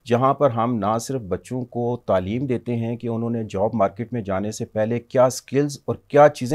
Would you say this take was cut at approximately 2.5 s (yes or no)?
no